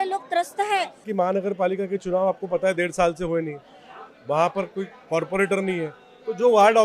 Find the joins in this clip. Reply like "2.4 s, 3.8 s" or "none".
1.1 s